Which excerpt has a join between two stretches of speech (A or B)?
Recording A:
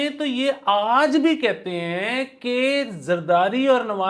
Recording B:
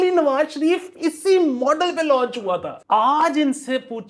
B